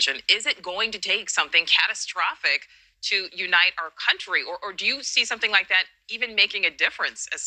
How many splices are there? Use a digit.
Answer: 0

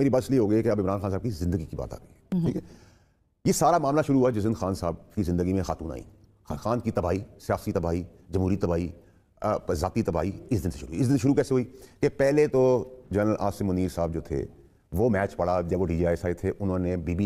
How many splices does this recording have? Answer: 0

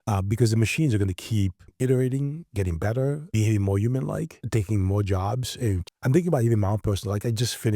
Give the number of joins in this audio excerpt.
4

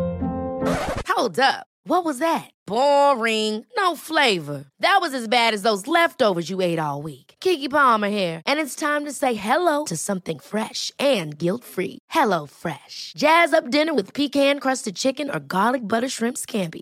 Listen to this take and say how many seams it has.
0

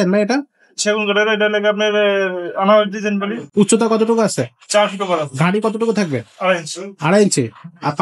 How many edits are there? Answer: 0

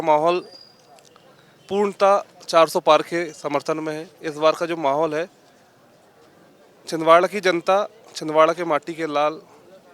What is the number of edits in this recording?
0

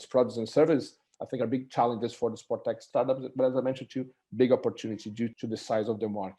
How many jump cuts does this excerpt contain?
2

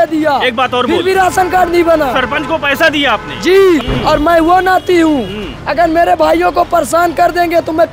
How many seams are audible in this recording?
1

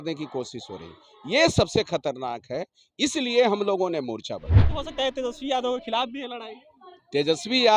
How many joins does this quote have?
1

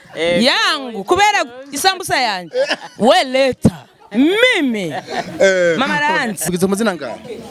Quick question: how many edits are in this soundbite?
1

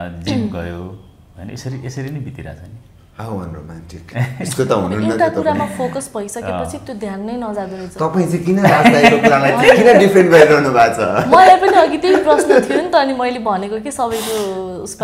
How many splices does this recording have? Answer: 0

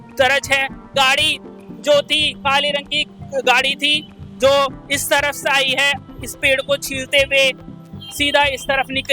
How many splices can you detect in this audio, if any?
1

